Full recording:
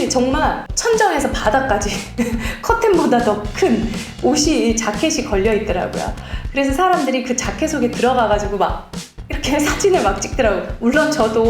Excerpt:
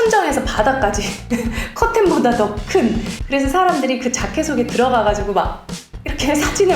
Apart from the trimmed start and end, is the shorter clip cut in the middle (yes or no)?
yes